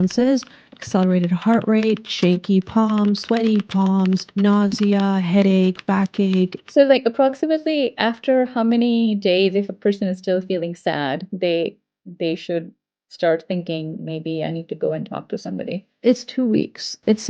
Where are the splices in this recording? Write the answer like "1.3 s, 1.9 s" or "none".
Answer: 4.3 s, 6.7 s, 16.0 s